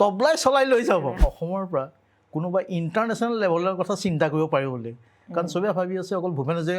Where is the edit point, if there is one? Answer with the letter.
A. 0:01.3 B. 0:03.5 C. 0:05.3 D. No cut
A